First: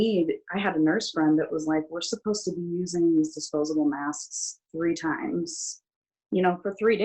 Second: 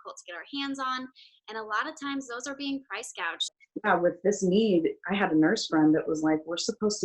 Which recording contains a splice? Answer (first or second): second